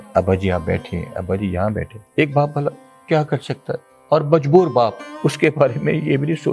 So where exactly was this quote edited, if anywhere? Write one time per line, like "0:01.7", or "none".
0:02.0
0:05.1